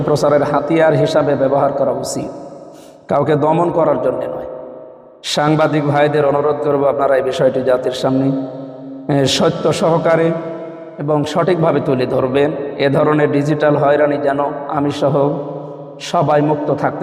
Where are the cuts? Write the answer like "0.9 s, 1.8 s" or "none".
none